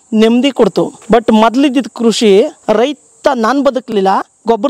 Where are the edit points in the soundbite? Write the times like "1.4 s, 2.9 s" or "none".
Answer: 1.0 s, 2.6 s